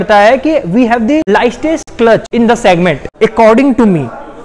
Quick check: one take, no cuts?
no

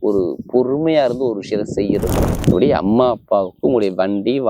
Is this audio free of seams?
no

